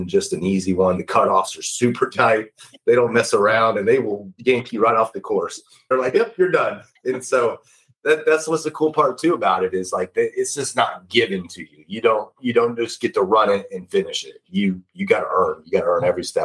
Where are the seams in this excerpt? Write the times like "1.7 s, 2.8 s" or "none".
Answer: 5.9 s